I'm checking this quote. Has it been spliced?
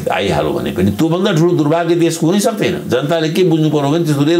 no; 0 cuts

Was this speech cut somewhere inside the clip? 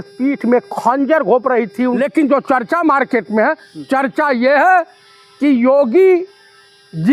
yes; 1 cut; at 2.0 s

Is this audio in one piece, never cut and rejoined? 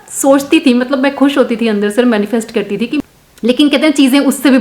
no; 1 cut; at 3.0 s

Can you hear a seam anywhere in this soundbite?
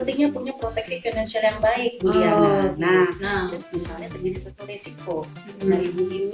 yes; 1 cut; at 3.2 s

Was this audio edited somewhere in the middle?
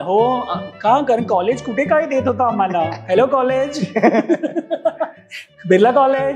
no; 0 cuts

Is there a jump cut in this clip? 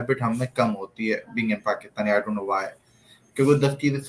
no; 0 cuts

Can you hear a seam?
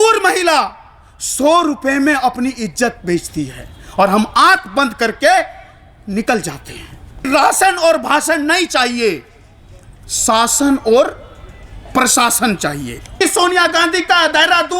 yes; 2 cuts; at 7.3 s, 13.1 s

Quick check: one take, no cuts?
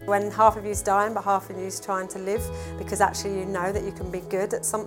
yes; 0 cuts

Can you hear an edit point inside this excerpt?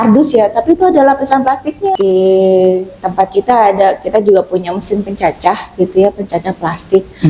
yes; 1 cut; at 1.8 s

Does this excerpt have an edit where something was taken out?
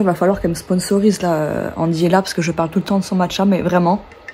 no; 0 cuts

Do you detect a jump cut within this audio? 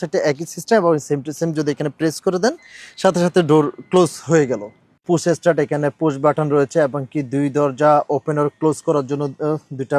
yes; 1 cut; at 5.0 s

